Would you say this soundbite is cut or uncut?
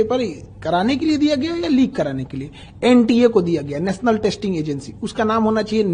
uncut